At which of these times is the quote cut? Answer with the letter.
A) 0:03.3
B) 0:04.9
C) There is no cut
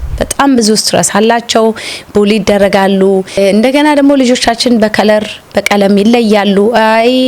A